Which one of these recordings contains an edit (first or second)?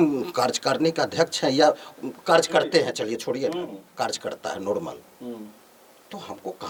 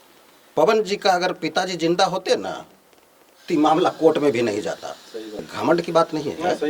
second